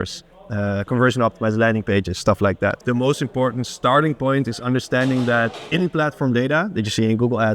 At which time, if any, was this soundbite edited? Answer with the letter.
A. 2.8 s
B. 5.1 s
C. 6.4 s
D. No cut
A